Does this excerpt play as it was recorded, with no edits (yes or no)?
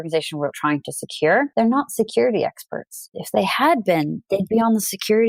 no